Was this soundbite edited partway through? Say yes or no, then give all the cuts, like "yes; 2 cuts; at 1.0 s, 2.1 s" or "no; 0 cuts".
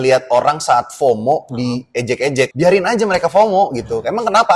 yes; 1 cut; at 2.5 s